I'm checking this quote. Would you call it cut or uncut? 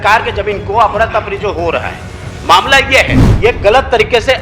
cut